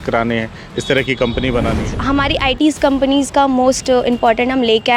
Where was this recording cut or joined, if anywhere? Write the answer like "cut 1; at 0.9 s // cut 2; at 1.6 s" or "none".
cut 1; at 1.9 s